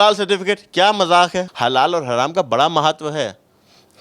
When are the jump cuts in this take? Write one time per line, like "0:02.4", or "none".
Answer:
0:01.5